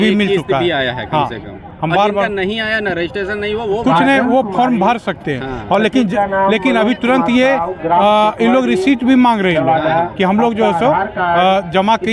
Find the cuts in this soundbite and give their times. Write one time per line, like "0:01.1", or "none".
none